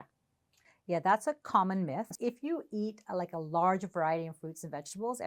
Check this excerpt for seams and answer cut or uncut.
cut